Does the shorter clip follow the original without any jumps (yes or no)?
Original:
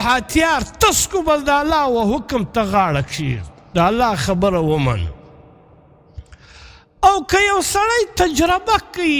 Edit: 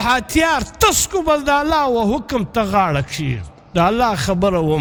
yes